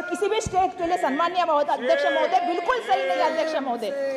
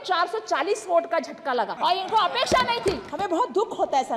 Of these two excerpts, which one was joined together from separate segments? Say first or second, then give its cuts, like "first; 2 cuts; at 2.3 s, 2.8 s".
second; 2 cuts; at 1.7 s, 3.1 s